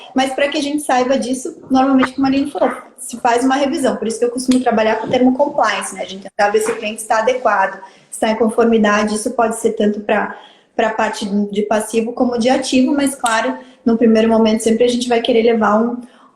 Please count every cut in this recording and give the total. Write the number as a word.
zero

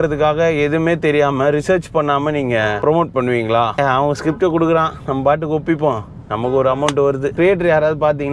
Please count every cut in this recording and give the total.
two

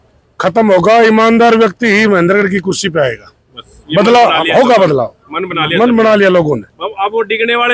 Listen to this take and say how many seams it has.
zero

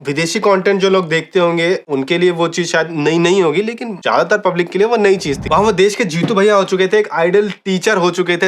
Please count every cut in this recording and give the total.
one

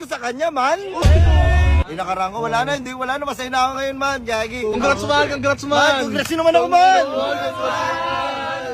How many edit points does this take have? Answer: two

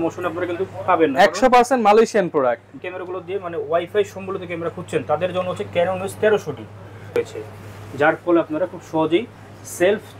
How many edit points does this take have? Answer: two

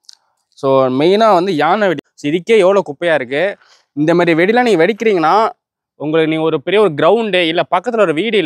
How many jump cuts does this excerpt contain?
one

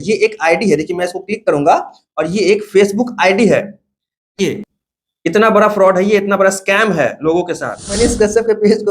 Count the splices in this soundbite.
one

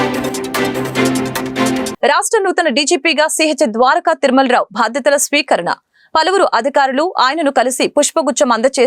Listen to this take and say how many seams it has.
one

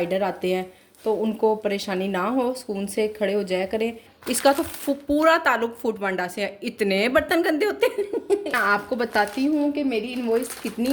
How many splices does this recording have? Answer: two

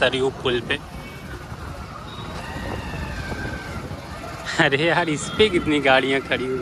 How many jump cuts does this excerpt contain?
zero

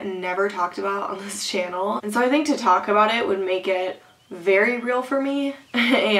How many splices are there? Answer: one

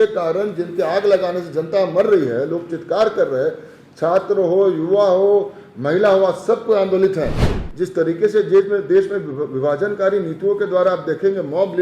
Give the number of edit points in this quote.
one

